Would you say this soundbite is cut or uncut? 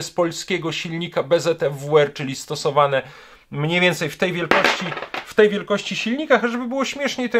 uncut